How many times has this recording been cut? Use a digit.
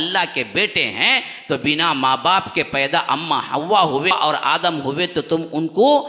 1